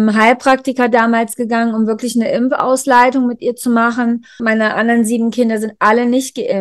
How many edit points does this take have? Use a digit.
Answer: 1